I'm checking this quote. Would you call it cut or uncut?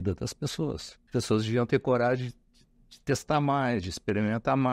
cut